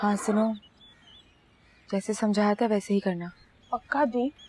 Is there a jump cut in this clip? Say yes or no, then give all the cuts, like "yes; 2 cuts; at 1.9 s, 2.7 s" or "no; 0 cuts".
no; 0 cuts